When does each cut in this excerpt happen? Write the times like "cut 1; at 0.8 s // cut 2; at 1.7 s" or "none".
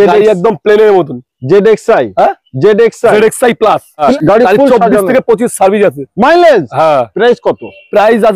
cut 1; at 4.1 s